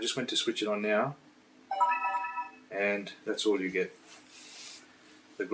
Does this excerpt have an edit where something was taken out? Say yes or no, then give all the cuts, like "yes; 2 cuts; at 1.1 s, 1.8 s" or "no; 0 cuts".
no; 0 cuts